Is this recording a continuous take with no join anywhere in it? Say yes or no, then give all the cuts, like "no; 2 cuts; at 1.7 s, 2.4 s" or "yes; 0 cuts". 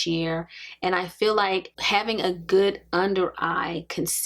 no; 1 cut; at 1.7 s